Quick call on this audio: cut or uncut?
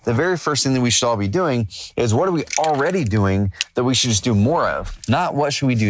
cut